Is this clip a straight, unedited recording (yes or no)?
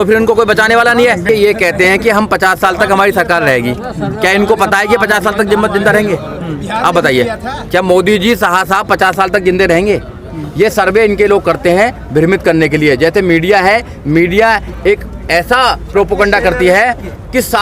no